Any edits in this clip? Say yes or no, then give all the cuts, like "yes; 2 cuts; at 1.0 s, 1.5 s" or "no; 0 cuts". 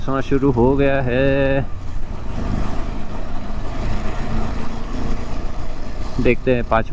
no; 0 cuts